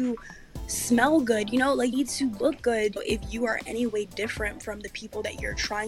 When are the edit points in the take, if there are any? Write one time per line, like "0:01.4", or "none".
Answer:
0:03.0

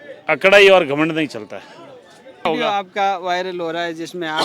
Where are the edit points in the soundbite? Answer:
0:02.5

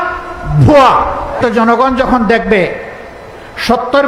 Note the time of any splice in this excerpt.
0:01.4

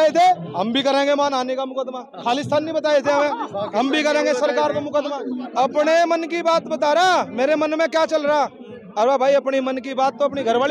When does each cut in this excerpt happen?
0:05.4

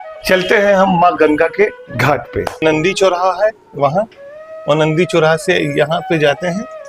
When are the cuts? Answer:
0:02.6

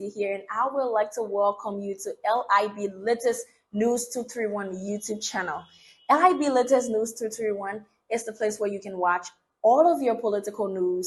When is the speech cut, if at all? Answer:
none

